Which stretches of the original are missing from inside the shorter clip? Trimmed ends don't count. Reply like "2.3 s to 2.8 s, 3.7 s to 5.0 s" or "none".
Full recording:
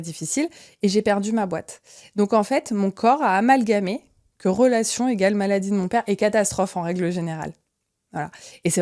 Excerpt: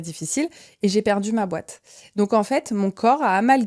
none